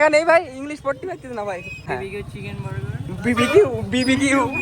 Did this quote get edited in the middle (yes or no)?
yes